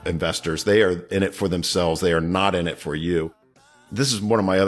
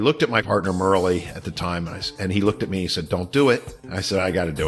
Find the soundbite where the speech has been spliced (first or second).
first